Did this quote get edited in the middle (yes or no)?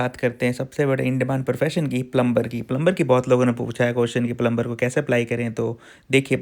no